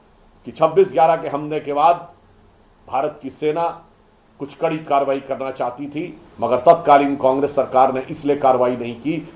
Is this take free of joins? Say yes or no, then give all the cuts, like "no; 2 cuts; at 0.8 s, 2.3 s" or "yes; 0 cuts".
yes; 0 cuts